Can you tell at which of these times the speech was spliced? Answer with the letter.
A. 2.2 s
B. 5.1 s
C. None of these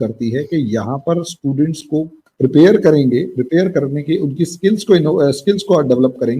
A